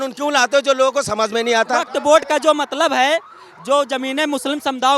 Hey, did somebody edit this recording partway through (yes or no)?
yes